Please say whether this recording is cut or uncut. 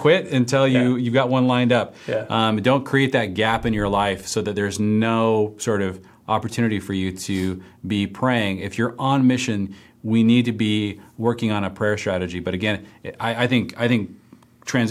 uncut